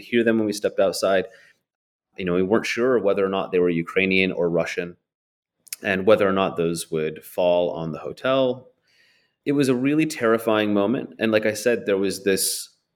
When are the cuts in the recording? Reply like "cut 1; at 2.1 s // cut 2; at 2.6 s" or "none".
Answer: none